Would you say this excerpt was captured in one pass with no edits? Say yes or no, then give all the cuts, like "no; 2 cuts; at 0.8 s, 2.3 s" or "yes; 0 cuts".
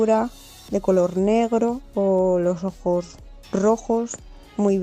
no; 1 cut; at 1.8 s